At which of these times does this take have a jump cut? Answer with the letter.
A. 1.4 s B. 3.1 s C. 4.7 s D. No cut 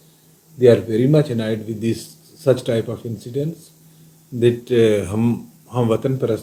D